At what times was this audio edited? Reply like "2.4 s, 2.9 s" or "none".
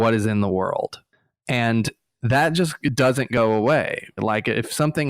4.2 s